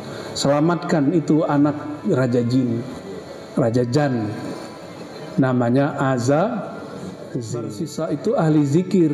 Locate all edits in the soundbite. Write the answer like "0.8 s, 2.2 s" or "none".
7.7 s